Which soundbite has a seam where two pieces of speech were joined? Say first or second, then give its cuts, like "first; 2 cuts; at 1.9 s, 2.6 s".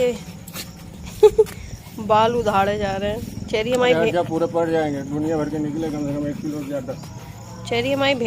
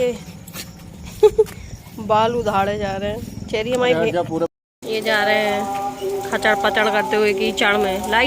second; 1 cut; at 4.5 s